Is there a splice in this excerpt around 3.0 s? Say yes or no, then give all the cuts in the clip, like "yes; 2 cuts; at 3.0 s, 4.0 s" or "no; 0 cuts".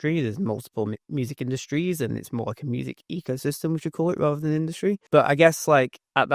no; 1 cut; at 5.0 s